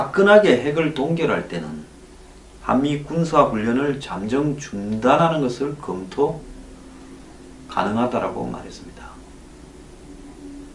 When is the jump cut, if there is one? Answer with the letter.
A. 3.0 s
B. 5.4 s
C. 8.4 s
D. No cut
A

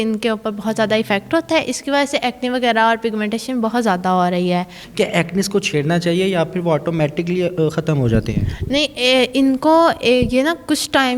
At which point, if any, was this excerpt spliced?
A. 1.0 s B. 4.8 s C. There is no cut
B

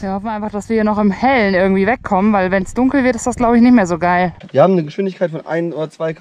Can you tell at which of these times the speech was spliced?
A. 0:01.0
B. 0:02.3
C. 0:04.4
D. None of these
C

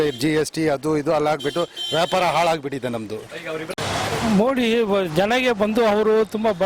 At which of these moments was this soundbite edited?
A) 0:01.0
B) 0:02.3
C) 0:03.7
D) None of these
C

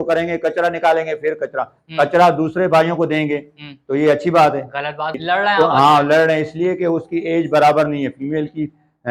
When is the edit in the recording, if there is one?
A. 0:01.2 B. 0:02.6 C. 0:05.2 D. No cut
C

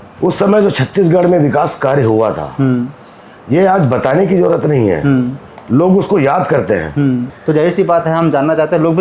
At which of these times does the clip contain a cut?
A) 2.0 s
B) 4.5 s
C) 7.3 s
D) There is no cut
C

